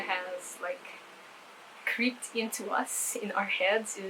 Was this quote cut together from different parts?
no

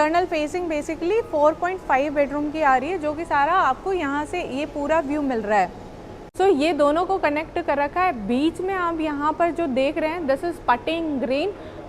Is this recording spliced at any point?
yes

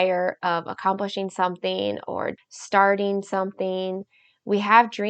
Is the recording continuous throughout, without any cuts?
no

